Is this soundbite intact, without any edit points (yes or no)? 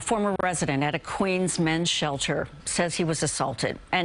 yes